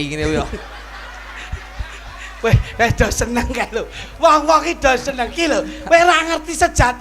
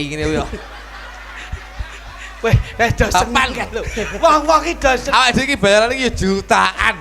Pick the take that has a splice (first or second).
second